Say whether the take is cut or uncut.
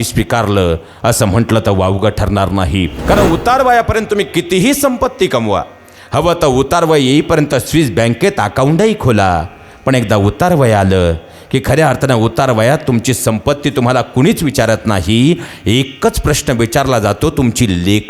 cut